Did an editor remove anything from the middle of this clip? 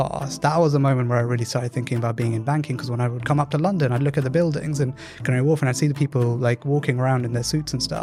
no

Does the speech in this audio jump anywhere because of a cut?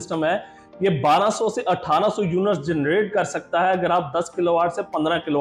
no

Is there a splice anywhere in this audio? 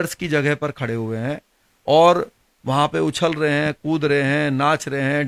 no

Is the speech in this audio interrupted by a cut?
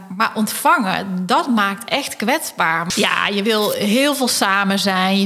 yes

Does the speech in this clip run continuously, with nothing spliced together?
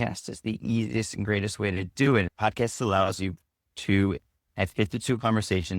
no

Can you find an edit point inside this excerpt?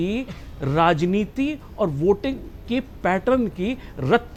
no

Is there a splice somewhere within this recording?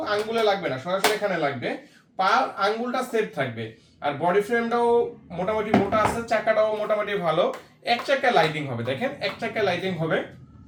no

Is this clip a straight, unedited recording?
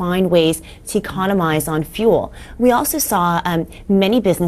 no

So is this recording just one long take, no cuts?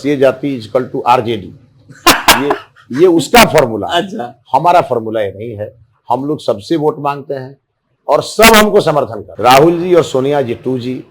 no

